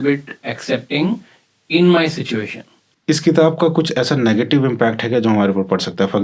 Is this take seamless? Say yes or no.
no